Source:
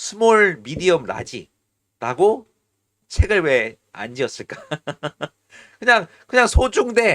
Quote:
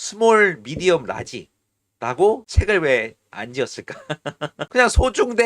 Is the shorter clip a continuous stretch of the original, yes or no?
no